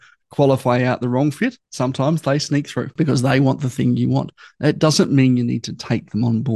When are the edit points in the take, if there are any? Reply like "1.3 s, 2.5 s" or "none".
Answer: 1.7 s, 2.9 s